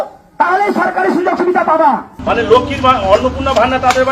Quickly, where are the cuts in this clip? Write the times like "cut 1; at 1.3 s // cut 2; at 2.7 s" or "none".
cut 1; at 2.1 s